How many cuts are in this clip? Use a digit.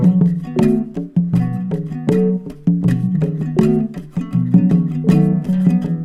0